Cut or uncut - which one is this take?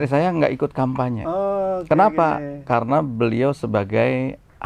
uncut